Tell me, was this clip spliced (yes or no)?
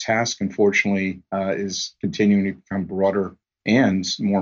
no